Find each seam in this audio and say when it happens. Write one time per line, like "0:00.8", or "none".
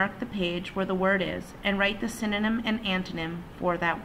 0:02.6